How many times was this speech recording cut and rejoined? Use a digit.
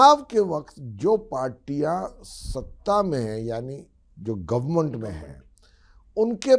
0